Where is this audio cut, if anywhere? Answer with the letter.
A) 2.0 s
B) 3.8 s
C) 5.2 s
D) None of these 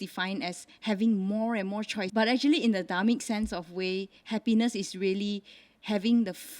A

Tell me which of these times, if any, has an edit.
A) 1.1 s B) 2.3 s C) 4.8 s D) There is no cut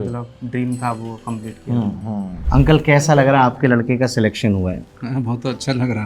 B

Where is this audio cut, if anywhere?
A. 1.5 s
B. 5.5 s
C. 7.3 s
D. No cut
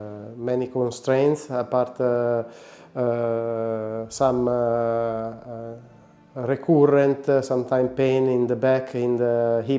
D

